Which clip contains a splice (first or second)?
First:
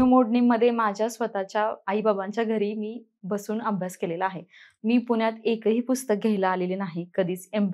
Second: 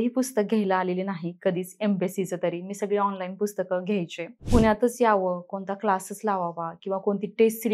second